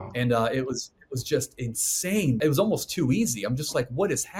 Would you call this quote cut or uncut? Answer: cut